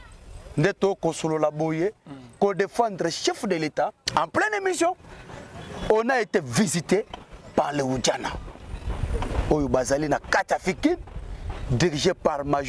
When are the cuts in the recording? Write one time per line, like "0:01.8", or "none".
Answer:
0:04.0